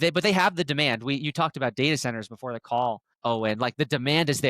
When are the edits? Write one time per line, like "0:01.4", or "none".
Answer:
0:03.1